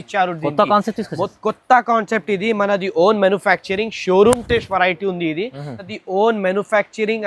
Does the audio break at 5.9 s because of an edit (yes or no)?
yes